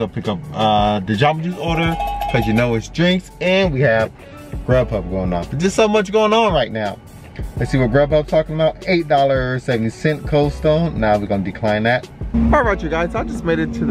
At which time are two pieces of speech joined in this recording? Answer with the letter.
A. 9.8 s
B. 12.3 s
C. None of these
B